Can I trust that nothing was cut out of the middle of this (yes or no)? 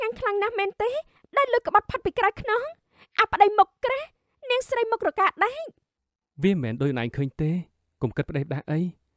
yes